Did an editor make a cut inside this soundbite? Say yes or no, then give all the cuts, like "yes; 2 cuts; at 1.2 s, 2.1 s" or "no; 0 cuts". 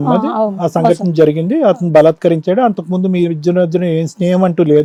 no; 0 cuts